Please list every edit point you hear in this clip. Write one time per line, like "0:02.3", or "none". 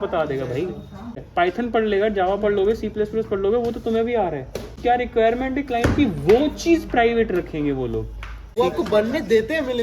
0:01.2
0:04.8
0:08.5